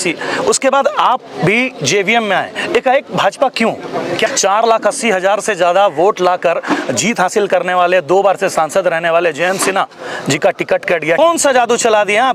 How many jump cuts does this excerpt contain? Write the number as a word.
two